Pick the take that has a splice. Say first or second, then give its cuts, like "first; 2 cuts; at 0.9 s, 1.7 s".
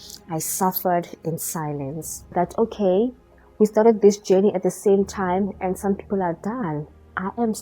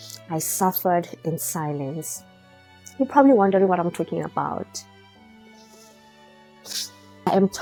first; 1 cut; at 2.2 s